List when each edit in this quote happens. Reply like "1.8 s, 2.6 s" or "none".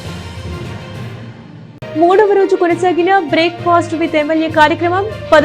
1.4 s